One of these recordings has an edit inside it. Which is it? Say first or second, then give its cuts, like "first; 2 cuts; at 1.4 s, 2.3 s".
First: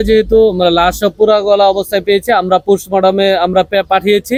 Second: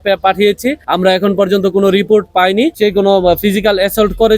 second; 1 cut; at 2.7 s